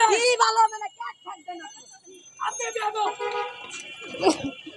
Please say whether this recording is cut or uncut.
uncut